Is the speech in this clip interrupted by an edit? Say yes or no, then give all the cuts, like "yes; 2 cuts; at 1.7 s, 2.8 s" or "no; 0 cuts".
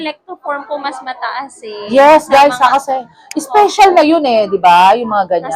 no; 0 cuts